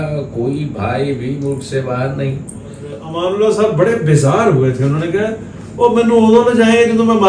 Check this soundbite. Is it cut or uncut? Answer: cut